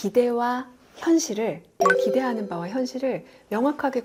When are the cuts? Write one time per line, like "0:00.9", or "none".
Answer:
none